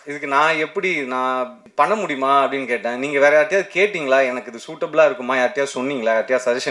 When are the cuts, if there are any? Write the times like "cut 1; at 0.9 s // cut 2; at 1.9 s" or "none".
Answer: cut 1; at 1.6 s